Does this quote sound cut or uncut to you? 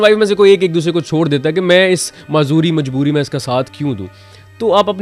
uncut